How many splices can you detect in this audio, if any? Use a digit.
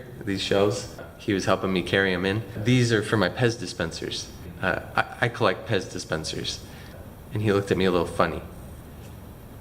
3